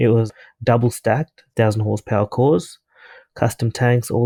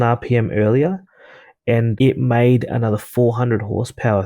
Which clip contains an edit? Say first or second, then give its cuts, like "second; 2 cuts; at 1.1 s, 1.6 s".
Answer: second; 1 cut; at 1.0 s